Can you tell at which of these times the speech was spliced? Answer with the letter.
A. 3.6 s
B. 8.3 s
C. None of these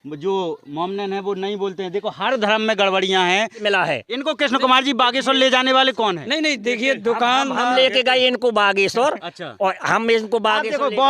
A